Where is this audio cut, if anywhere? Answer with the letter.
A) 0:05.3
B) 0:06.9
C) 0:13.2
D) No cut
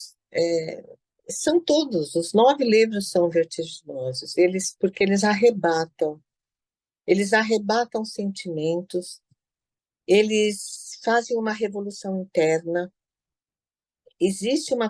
D